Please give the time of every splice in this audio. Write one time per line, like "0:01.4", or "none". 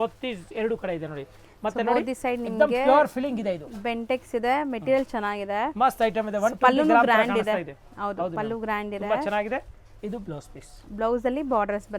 none